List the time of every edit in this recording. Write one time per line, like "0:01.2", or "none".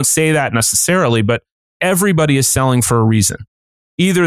none